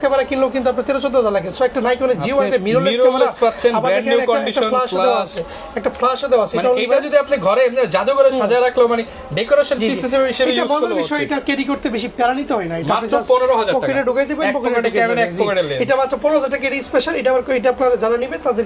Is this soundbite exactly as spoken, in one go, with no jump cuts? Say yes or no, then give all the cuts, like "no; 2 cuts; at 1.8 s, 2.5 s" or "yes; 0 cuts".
yes; 0 cuts